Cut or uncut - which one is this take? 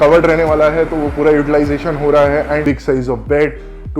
cut